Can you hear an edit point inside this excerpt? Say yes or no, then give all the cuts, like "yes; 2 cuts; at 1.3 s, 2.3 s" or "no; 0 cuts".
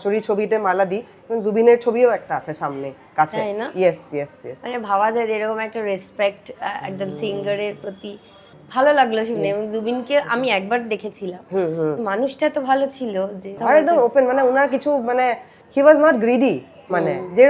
no; 0 cuts